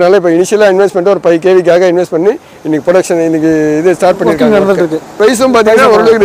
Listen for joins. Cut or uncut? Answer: cut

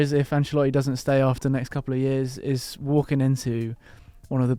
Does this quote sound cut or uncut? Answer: uncut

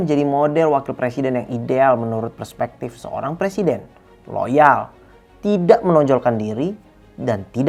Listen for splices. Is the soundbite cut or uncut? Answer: uncut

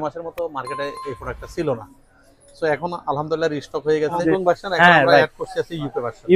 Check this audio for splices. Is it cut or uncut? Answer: cut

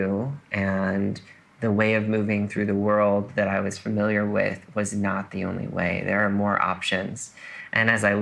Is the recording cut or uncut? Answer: uncut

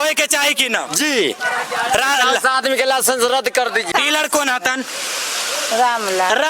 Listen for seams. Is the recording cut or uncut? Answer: cut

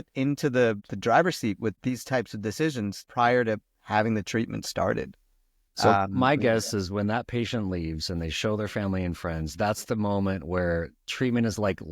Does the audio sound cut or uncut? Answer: cut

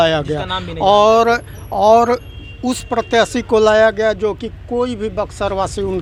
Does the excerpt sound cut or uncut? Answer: uncut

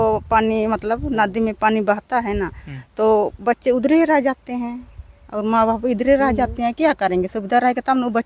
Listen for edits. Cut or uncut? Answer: uncut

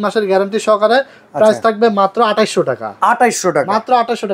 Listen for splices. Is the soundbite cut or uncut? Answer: uncut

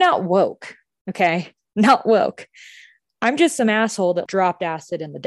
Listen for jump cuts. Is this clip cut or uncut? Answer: cut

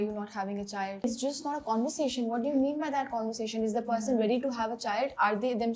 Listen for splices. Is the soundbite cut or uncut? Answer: cut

